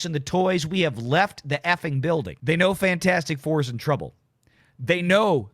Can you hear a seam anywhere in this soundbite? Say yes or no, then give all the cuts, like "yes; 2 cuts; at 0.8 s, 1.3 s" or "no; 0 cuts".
yes; 1 cut; at 2.3 s